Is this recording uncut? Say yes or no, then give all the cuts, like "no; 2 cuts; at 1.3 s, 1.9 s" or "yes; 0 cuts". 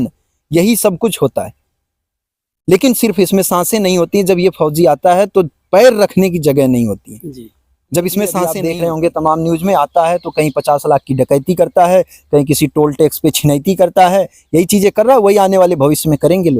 no; 1 cut; at 8.6 s